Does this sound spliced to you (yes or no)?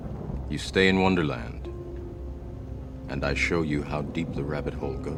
no